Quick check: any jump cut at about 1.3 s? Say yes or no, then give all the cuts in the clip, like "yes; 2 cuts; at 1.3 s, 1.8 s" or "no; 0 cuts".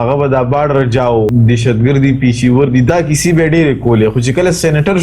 yes; 2 cuts; at 1.3 s, 2.9 s